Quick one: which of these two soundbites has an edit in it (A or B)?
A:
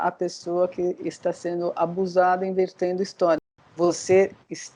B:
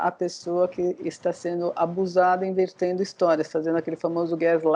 A